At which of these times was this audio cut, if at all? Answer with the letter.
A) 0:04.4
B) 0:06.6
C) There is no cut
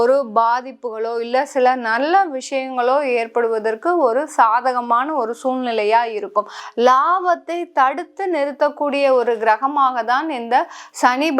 B